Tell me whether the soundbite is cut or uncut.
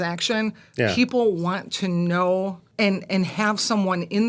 cut